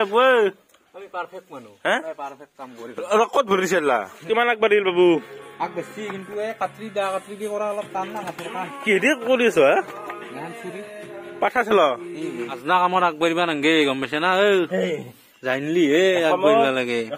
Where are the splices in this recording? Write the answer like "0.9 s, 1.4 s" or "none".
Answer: 4.1 s, 12.5 s